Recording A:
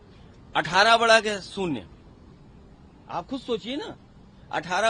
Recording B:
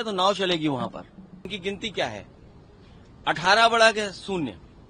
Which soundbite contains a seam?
B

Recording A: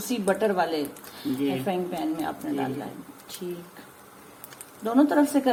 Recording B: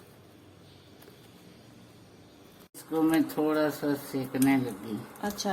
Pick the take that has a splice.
B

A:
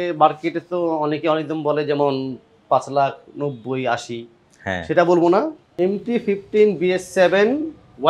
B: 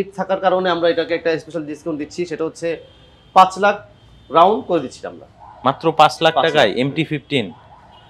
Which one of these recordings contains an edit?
A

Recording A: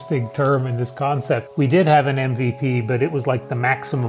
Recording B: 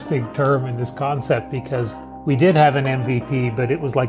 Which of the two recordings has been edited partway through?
A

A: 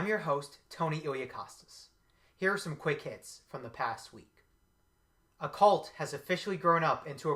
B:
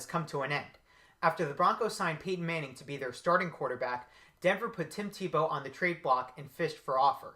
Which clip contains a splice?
B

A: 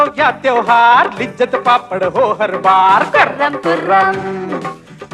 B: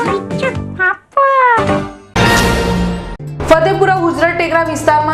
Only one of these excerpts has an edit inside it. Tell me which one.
B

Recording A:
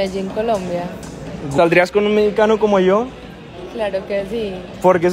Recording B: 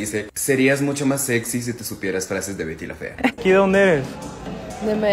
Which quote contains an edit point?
B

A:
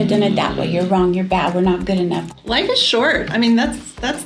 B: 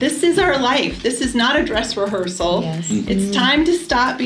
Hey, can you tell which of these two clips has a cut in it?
A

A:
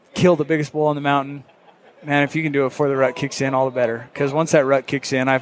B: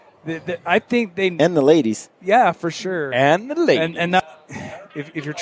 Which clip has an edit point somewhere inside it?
B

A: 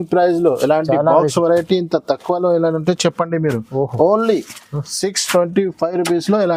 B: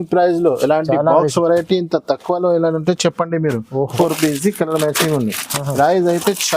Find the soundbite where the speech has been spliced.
B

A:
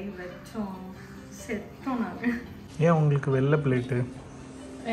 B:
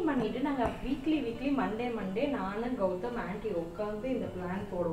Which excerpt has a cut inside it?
A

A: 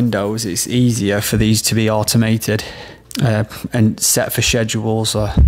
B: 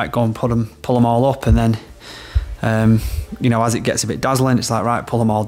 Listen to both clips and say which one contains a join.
A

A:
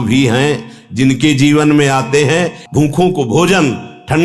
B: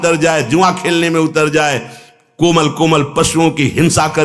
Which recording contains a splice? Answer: A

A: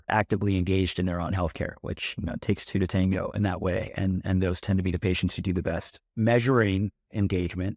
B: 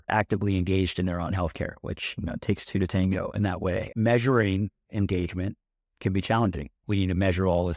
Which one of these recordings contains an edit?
B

